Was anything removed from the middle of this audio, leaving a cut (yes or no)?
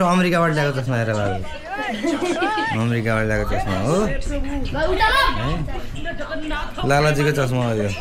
no